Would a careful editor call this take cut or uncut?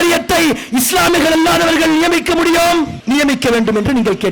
cut